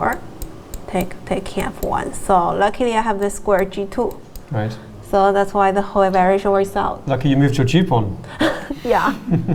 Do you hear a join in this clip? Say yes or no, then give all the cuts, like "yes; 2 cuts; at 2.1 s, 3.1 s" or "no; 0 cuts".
no; 0 cuts